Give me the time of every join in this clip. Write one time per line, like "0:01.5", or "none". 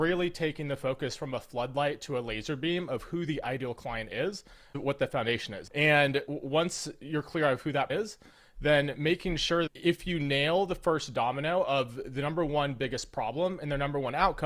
0:05.5
0:07.9
0:09.7